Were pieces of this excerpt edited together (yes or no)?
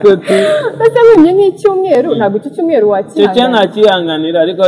no